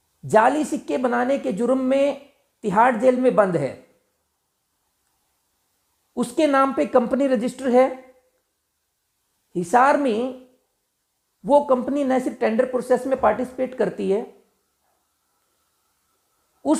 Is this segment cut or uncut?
uncut